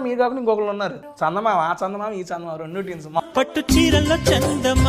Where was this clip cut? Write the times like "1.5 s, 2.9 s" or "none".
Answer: 1.0 s, 3.2 s